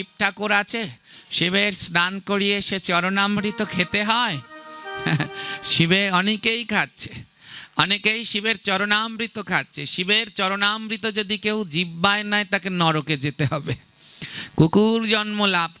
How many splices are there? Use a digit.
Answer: 0